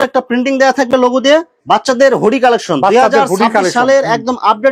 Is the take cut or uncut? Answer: cut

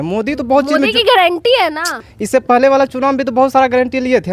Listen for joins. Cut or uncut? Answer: cut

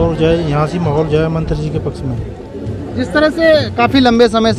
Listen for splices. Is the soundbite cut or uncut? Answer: uncut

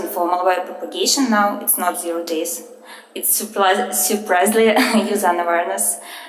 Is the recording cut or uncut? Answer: cut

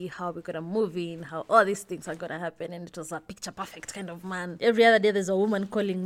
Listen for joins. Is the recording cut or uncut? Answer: cut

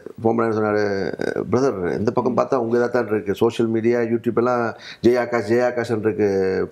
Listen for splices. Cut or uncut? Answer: uncut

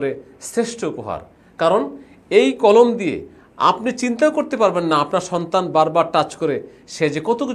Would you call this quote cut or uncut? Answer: uncut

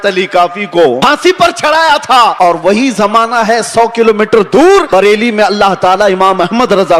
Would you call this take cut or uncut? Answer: cut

